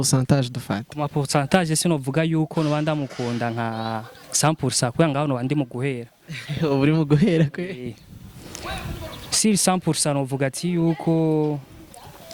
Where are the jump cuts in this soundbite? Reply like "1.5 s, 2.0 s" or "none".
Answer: none